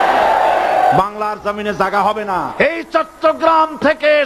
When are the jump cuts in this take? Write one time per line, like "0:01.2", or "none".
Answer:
0:02.6